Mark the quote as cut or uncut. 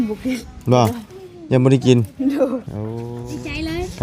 cut